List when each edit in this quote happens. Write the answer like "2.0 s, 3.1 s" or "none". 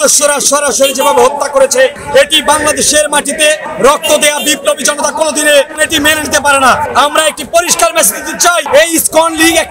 none

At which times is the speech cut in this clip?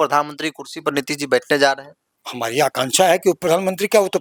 none

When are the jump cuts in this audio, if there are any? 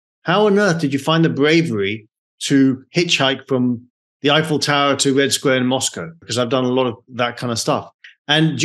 6.2 s

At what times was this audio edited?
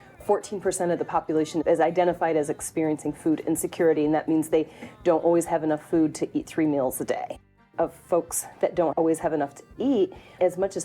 7.5 s, 8.9 s

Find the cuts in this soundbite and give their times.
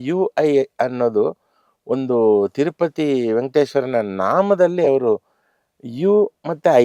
none

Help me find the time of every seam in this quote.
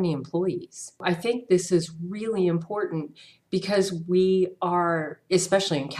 1.0 s

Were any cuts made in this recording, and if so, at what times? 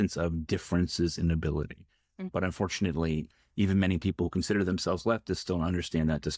none

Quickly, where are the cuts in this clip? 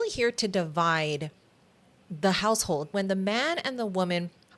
2.9 s

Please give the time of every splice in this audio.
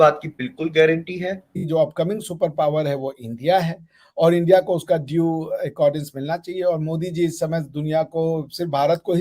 1.5 s

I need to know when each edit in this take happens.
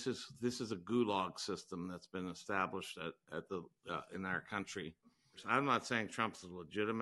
5.4 s

